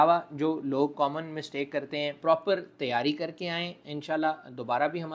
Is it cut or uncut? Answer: cut